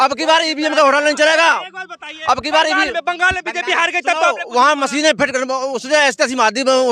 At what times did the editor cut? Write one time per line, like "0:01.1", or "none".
none